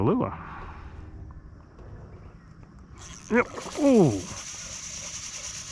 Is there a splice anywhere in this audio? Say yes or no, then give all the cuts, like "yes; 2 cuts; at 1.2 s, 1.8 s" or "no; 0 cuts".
yes; 1 cut; at 1.5 s